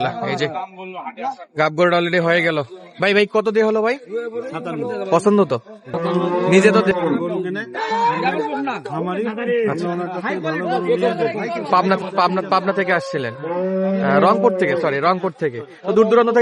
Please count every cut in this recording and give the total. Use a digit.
1